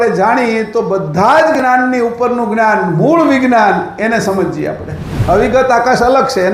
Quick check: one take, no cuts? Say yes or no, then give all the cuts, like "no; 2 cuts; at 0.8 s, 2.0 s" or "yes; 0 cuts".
no; 1 cut; at 5.1 s